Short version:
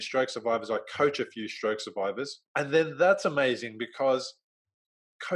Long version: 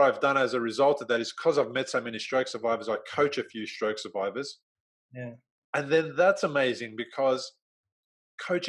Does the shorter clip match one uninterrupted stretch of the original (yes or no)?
no